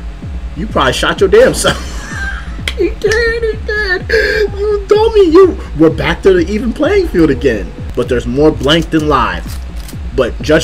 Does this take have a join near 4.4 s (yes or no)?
no